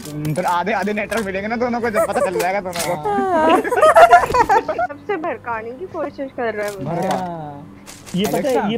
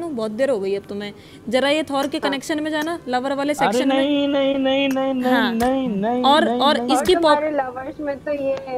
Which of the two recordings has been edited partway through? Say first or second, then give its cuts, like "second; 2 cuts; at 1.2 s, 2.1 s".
first; 1 cut; at 5.0 s